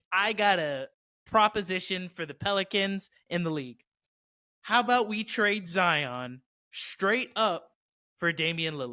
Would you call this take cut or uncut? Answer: uncut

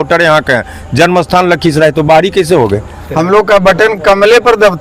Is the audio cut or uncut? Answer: cut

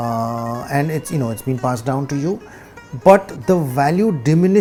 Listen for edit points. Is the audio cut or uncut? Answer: uncut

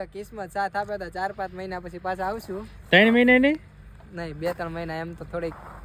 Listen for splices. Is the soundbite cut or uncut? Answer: uncut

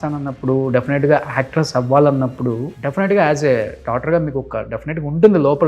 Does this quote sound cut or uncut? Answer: cut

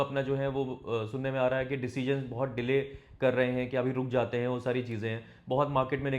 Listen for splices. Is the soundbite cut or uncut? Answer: uncut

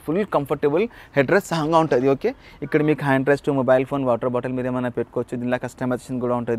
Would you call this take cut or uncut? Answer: uncut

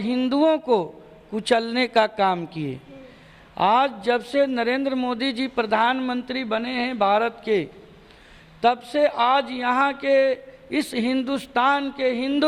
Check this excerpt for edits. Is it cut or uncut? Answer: uncut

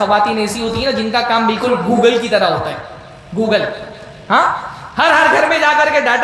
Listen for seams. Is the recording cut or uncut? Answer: uncut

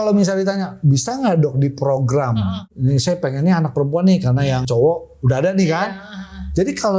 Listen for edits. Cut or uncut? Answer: cut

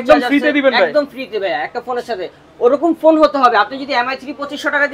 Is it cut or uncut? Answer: uncut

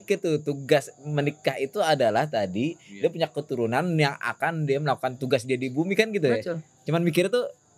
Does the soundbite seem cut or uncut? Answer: uncut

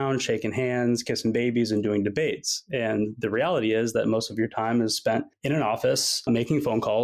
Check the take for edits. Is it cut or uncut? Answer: uncut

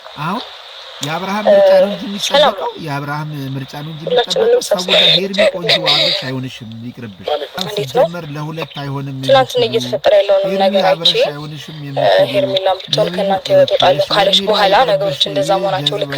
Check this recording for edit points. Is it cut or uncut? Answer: cut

